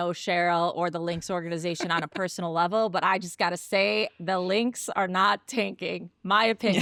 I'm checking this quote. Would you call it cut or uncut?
uncut